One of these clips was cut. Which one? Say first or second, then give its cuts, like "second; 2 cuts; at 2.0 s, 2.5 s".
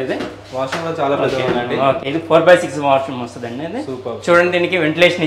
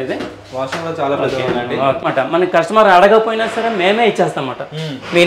second; 1 cut; at 2.1 s